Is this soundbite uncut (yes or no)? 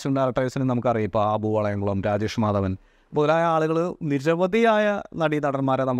yes